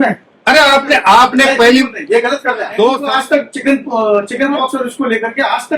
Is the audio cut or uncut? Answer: cut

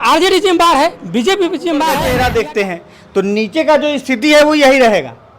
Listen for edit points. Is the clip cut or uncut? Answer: cut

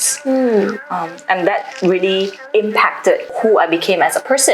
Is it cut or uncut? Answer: cut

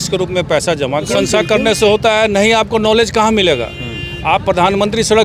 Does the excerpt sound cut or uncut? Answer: cut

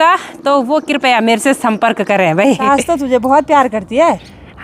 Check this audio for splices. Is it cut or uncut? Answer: cut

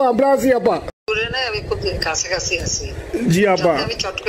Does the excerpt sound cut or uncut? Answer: cut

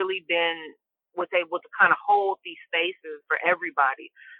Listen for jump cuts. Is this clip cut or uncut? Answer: cut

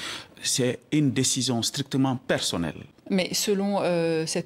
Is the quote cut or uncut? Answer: cut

